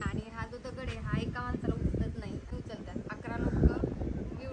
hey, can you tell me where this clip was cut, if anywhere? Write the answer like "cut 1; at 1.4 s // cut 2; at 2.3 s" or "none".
cut 1; at 2.6 s